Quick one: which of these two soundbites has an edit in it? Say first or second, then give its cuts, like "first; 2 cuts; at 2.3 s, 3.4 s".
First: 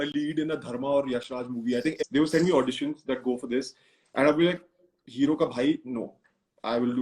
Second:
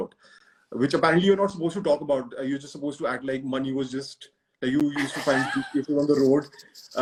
first; 1 cut; at 2.0 s